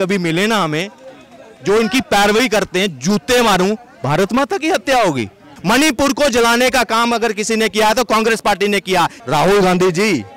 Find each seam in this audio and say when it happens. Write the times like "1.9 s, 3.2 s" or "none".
5.5 s, 9.2 s